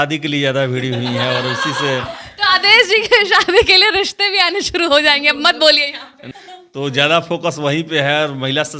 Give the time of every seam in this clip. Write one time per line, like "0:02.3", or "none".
0:06.3

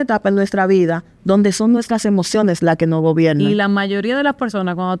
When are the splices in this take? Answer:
0:03.4

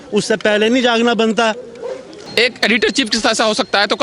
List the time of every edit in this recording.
0:02.2

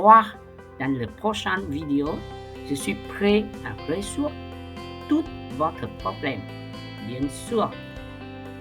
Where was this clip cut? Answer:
0:07.7

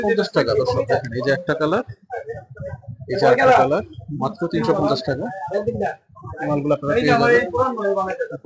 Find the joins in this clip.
none

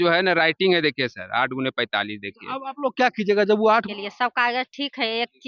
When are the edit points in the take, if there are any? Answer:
0:03.9

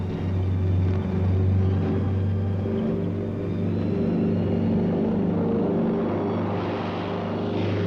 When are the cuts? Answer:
none

